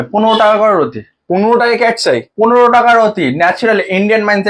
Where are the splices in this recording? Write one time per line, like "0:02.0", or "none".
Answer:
none